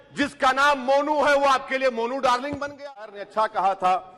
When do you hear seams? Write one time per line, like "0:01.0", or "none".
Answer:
0:03.2